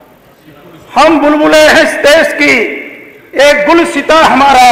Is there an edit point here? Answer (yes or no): no